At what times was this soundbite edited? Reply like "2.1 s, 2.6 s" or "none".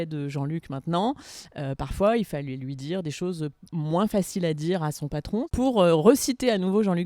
5.5 s